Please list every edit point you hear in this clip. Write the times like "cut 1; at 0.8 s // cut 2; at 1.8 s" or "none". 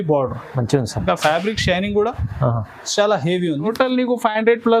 cut 1; at 3.7 s